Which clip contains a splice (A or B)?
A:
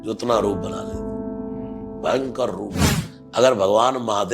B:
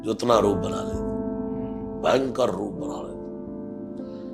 A